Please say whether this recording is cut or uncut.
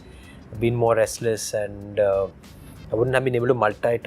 uncut